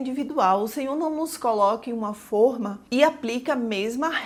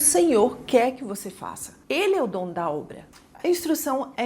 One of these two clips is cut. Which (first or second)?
second